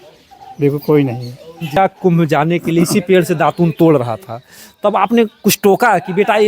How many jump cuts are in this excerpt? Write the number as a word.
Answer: one